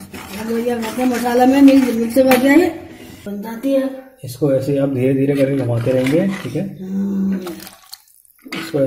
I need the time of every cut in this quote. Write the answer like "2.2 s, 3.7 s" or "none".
3.3 s